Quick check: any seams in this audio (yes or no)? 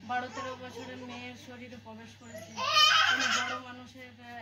no